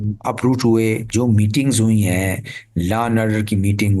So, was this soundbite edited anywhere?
yes; 1 cut; at 1.0 s

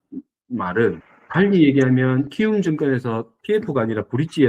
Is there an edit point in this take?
yes; 1 cut; at 1.1 s

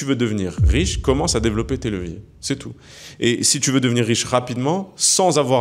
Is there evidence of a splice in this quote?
no; 0 cuts

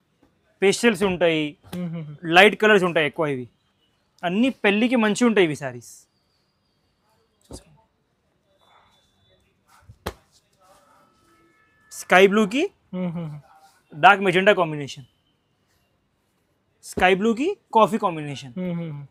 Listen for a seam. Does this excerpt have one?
no; 0 cuts

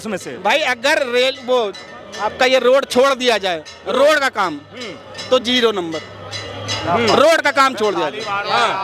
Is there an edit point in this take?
no; 0 cuts

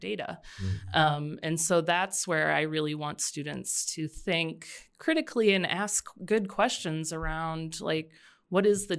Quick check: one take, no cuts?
yes; 0 cuts

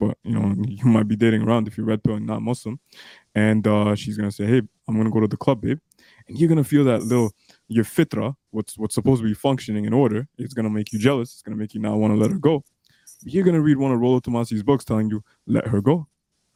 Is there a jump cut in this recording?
no; 0 cuts

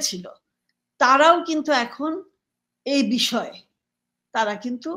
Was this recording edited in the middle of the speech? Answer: no; 0 cuts

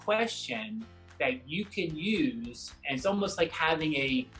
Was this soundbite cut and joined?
no; 0 cuts

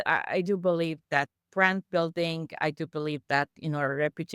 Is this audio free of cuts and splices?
no; 1 cut; at 1.0 s

